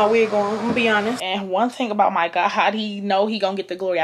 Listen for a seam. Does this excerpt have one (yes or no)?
yes